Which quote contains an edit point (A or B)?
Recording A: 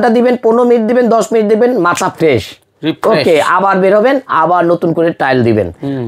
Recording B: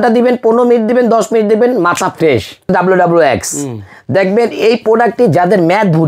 B